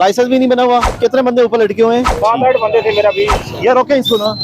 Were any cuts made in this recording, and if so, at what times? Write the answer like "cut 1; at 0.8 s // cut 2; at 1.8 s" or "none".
cut 1; at 0.9 s // cut 2; at 2.1 s // cut 3; at 3.4 s